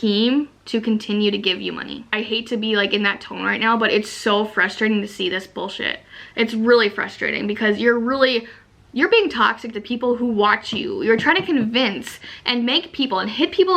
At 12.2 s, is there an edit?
no; 1 cut; at 2.1 s

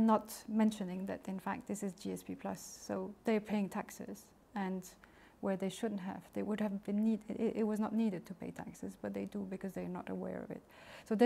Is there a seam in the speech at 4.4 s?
no; 0 cuts

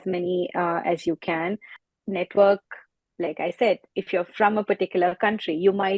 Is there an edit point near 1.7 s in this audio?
yes; 1 cut; at 1.7 s

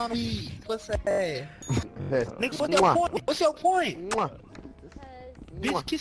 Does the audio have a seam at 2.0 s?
yes; 1 cut; at 2.0 s

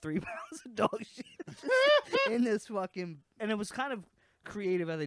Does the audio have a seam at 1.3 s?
no; 1 cut; at 3.3 s

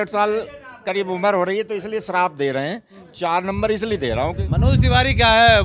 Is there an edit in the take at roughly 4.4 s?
yes; 1 cut; at 4.4 s

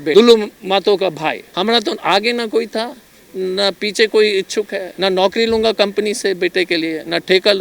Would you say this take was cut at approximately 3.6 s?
no; 2 cuts; at 1.5 s, 4.8 s

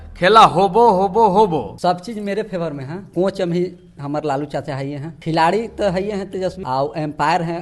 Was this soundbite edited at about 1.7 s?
yes; 4 cuts; at 1.7 s, 2.9 s, 5.1 s, 6.6 s

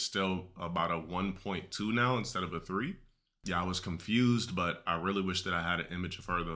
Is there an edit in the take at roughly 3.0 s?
no; 0 cuts

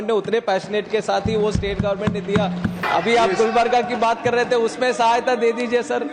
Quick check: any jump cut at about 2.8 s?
yes; 1 cut; at 2.8 s

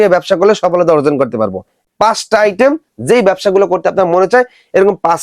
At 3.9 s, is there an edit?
no; 1 cut; at 1.7 s

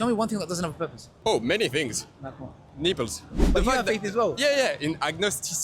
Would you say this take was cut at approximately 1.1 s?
yes; 2 cuts; at 1.1 s, 3.4 s

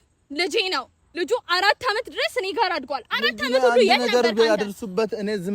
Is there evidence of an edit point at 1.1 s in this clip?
yes; 1 cut; at 1.1 s

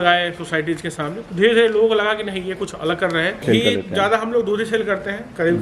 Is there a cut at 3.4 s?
yes; 1 cut; at 3.4 s

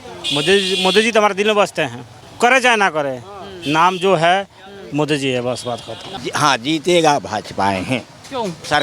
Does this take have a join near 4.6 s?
no; 2 cuts; at 2.2 s, 6.2 s

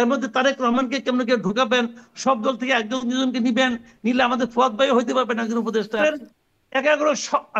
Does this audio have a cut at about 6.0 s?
yes; 1 cut; at 6.0 s

